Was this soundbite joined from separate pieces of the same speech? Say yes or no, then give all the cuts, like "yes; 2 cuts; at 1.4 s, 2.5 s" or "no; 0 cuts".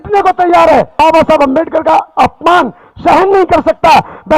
yes; 1 cut; at 0.9 s